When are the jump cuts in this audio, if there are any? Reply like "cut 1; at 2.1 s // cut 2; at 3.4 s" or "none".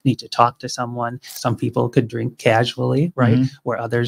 cut 1; at 1.3 s